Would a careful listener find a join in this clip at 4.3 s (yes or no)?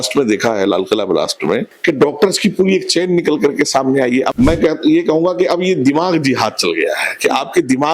yes